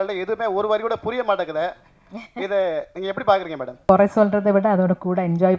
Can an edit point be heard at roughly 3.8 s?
yes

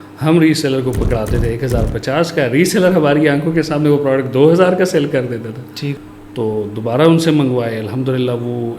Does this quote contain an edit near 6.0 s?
yes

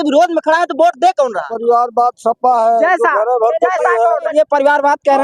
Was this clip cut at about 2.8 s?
no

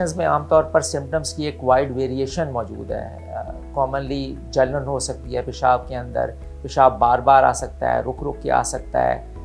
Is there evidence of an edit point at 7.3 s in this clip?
no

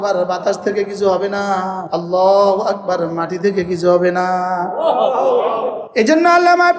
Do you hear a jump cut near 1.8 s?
yes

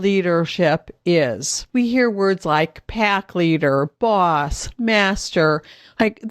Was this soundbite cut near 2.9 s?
no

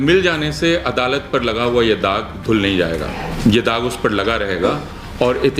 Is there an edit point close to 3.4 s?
yes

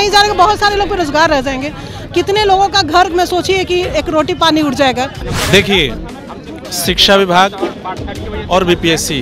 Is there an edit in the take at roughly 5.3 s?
yes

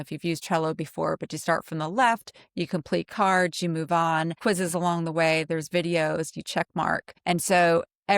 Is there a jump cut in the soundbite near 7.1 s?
yes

